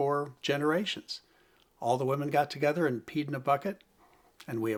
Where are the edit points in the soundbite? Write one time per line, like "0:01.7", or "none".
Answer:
none